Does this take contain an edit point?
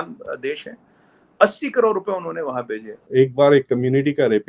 yes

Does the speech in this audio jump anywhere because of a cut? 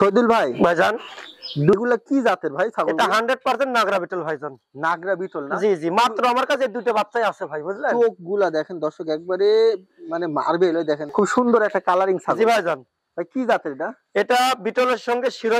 yes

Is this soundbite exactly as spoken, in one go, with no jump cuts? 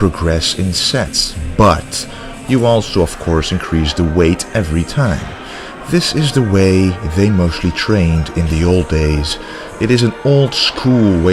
no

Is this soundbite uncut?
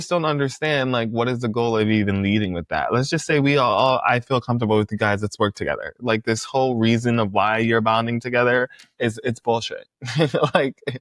yes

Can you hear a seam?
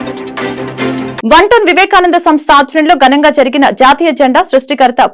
yes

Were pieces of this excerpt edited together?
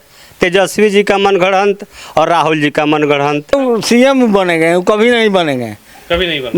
yes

